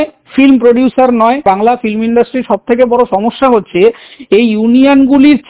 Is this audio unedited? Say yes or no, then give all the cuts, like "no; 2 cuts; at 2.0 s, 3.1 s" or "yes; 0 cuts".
no; 1 cut; at 1.4 s